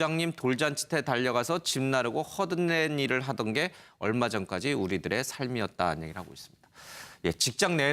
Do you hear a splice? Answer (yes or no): yes